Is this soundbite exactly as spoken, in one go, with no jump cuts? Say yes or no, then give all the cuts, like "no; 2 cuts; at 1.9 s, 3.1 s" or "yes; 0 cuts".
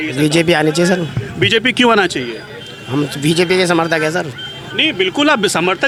yes; 0 cuts